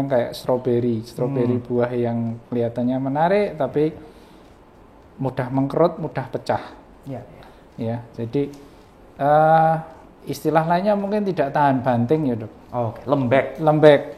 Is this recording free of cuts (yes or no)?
yes